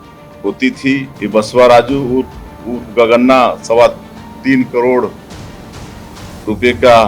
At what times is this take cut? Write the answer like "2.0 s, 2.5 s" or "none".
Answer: 1.1 s